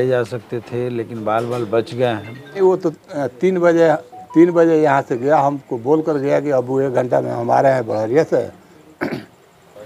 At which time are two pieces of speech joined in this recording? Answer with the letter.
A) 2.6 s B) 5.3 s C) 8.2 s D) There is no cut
A